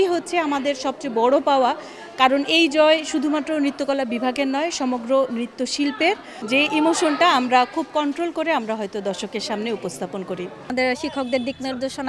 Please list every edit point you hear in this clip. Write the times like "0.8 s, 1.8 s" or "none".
6.3 s, 10.6 s